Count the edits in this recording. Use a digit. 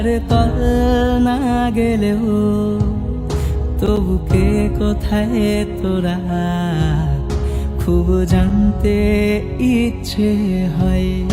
0